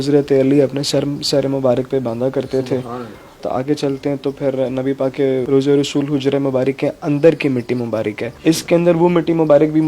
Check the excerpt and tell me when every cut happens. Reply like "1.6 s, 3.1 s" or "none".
none